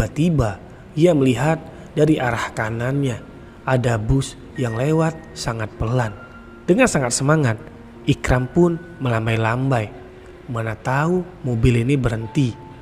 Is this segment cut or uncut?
uncut